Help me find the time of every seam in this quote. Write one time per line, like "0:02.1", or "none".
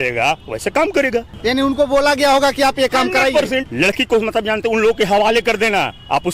0:01.3
0:03.7

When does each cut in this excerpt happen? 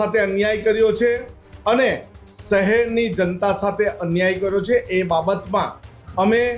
none

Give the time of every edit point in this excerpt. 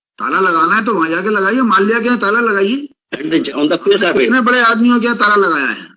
0:03.5

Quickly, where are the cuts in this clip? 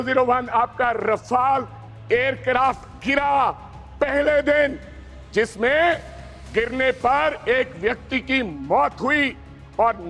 none

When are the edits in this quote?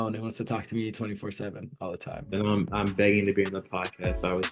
none

